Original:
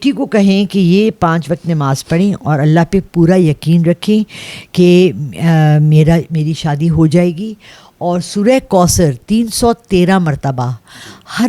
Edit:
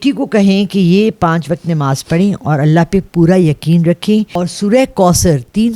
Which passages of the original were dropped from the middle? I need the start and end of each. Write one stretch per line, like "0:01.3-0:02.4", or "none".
0:04.4-0:08.1